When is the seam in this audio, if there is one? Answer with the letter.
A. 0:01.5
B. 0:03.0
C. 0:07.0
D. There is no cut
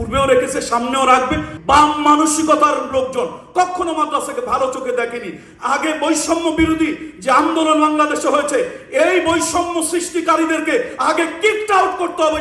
A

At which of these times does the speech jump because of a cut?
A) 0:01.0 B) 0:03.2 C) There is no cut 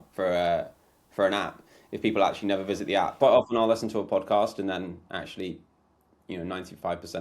B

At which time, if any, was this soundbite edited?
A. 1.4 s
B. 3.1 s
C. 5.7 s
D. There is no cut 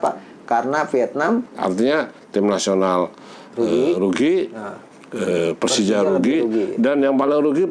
A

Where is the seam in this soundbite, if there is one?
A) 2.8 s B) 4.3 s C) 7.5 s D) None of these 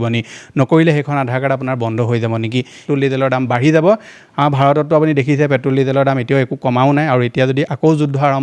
A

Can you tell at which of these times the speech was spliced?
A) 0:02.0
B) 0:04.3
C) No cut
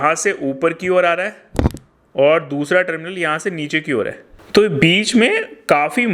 B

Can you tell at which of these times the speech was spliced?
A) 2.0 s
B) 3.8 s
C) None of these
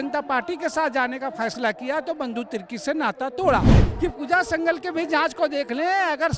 B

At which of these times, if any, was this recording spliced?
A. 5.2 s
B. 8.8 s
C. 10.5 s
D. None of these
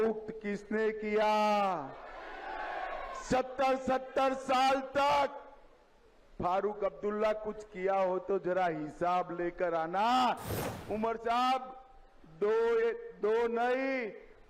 C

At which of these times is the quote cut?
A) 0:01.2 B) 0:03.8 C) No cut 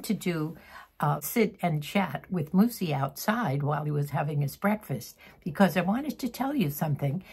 A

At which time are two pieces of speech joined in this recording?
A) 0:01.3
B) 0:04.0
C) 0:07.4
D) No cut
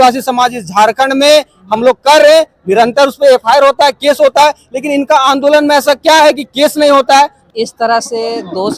C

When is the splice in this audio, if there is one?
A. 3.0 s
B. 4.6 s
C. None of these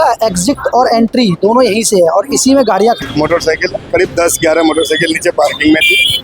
A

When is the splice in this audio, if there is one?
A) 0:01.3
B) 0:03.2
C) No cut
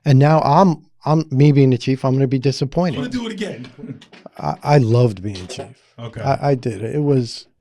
B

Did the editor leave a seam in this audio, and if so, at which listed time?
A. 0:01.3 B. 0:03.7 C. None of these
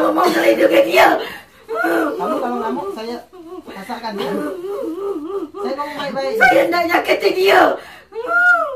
C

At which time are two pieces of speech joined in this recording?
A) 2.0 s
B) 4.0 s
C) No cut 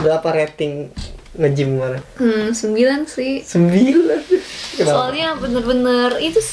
A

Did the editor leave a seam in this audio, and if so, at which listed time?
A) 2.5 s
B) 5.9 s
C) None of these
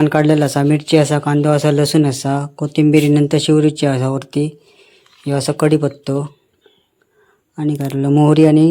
C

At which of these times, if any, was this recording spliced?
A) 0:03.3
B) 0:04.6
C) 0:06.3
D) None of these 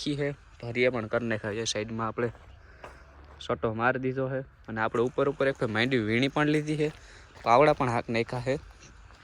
D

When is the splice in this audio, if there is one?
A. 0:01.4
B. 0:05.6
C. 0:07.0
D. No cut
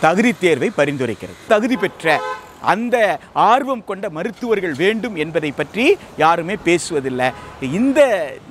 A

